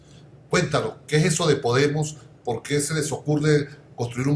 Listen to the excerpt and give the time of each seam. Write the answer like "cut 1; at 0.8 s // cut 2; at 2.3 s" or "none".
none